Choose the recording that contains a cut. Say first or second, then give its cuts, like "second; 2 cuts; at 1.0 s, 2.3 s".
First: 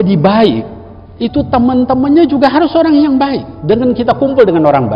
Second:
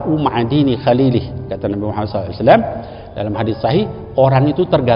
first; 1 cut; at 3.5 s